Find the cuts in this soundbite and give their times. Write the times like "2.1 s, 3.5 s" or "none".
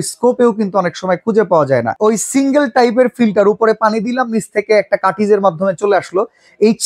1.9 s

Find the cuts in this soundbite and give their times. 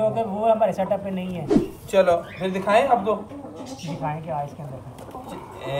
none

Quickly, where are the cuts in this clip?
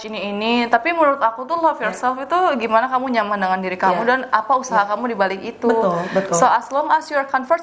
none

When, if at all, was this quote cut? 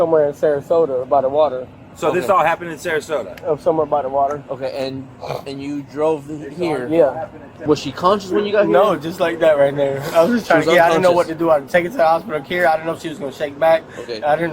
7.4 s

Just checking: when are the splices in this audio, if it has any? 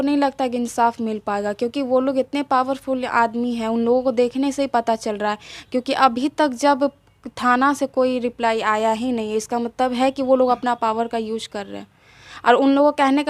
none

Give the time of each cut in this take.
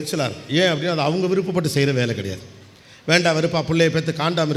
none

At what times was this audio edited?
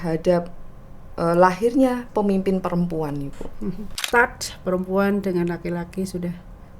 4.0 s

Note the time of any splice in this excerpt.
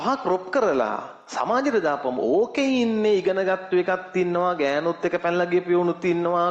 none

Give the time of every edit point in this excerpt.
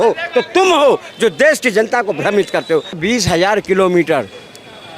3.0 s

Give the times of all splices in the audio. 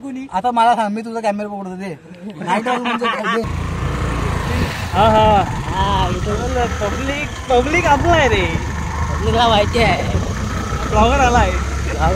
3.5 s

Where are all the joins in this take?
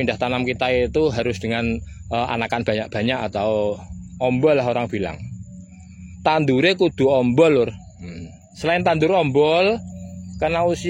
none

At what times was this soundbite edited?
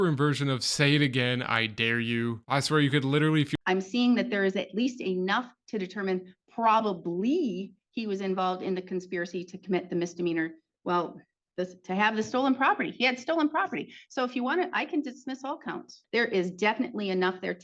3.5 s, 15.9 s

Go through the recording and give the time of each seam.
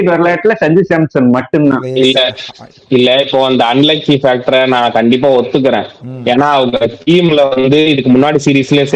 none

